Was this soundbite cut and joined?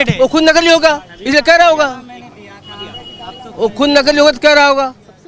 no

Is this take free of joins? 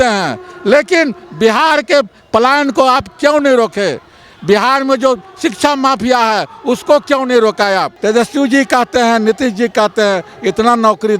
no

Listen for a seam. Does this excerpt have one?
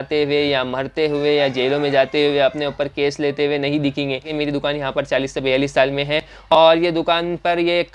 yes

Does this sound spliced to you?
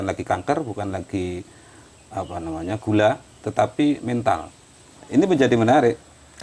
yes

